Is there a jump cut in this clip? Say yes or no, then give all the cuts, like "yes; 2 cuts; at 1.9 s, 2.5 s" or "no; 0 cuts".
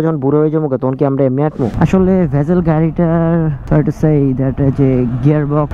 yes; 1 cut; at 1.7 s